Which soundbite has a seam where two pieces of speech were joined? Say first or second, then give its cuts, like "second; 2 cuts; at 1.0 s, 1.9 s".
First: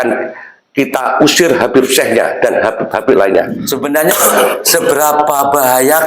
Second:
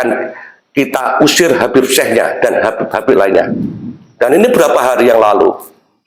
first; 1 cut; at 3.6 s